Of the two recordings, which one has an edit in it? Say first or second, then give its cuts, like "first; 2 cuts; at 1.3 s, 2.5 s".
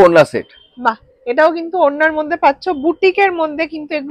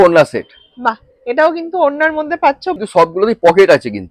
second; 1 cut; at 2.8 s